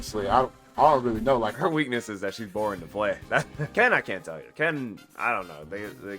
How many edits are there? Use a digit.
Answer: 1